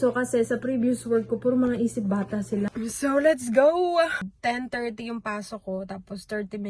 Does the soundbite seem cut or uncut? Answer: cut